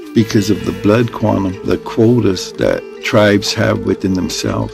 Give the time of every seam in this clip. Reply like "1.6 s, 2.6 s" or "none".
1.6 s